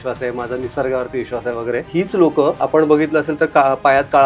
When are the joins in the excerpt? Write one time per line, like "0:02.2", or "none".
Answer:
0:01.9
0:02.6